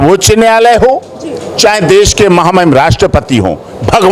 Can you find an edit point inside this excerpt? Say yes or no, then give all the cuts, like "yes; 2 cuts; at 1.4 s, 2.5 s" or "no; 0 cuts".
no; 0 cuts